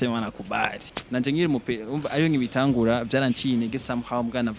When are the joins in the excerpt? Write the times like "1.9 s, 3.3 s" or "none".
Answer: 1.0 s